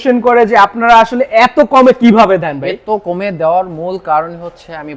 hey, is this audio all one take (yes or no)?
yes